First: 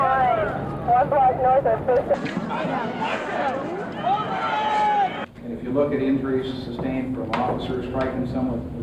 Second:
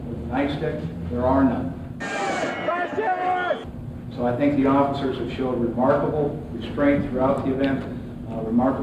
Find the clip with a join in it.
first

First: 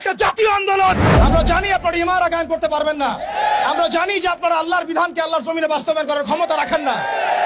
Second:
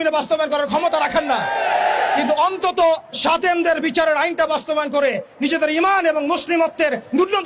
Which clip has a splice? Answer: first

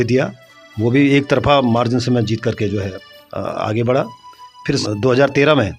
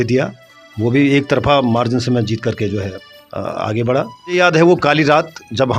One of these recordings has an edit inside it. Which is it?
second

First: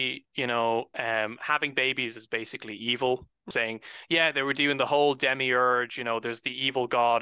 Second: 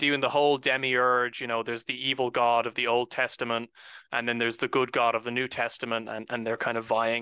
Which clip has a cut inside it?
first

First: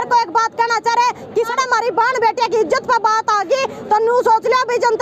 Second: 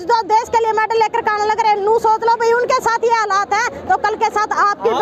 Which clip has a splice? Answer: first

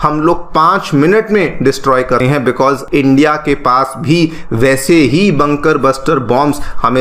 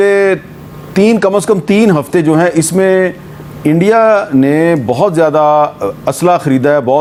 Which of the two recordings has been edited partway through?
first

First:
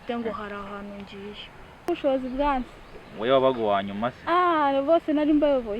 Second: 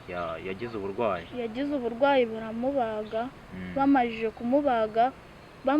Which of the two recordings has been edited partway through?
first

